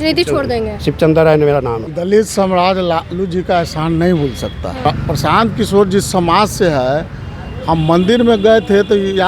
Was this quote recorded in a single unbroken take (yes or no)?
no